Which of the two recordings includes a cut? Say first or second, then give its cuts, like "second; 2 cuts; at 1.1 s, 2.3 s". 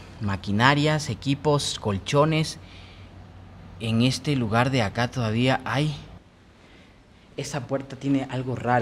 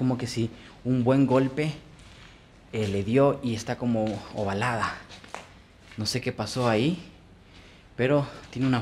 first; 1 cut; at 6.2 s